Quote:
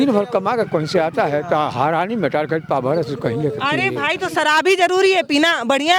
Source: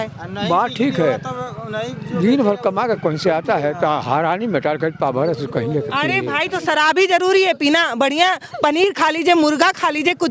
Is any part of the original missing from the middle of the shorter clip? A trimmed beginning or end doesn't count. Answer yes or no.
no